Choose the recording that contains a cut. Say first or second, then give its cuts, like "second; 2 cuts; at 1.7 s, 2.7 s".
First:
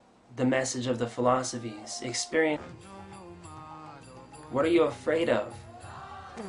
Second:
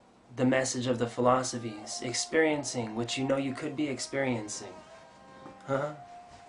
second; 1 cut; at 2.6 s